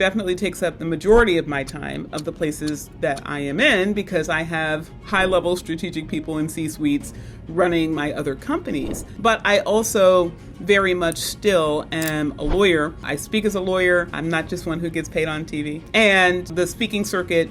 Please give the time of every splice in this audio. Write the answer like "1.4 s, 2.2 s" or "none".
9.0 s, 13.1 s, 14.1 s, 15.8 s, 16.5 s